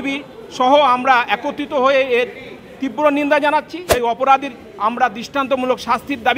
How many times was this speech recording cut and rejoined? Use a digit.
1